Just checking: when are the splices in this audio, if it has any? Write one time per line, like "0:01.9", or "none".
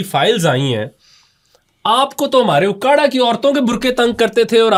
none